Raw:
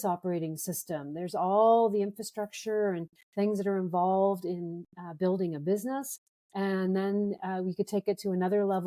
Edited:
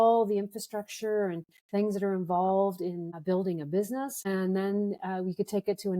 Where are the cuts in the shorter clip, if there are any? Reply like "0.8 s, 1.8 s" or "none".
3.1 s, 4.3 s

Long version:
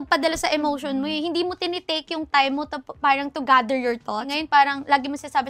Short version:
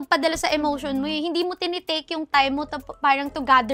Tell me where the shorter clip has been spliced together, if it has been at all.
none

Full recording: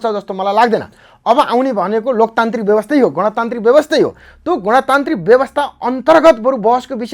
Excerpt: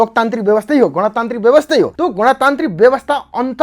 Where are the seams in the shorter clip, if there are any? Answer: 1.9 s

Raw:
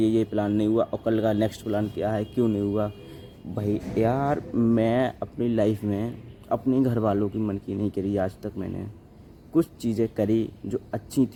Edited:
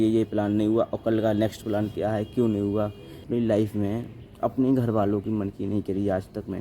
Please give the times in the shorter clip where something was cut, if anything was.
3.2 s

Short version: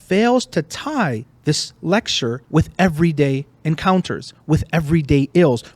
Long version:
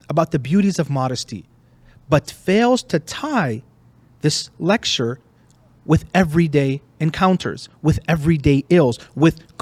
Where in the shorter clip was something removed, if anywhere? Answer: 1.3 s, 2.4 s

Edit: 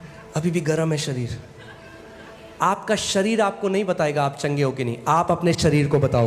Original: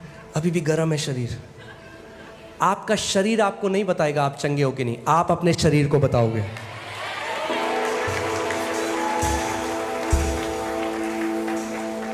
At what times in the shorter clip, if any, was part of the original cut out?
none

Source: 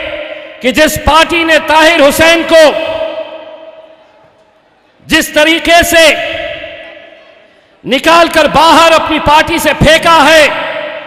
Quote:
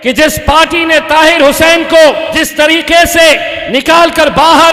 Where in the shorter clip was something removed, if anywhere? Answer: 2.3 s, 3.5 s

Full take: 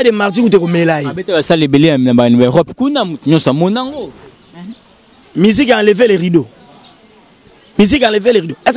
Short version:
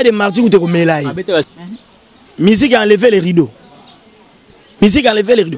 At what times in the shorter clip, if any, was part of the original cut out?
1.4 s

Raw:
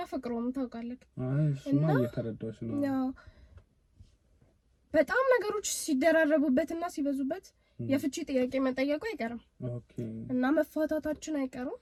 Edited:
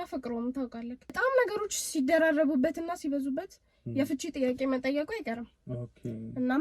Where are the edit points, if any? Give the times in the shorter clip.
1.1 s

